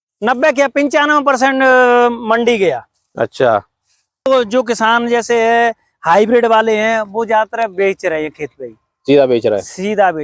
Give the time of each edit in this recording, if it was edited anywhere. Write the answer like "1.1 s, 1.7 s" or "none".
4.3 s